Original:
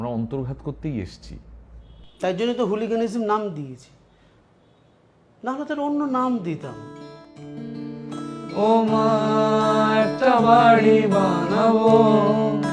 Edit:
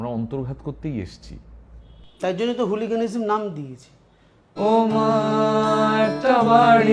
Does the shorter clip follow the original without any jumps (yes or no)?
no